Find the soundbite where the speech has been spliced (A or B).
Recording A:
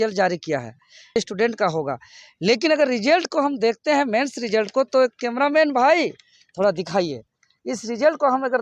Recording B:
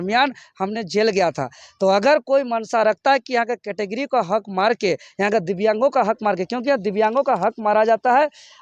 A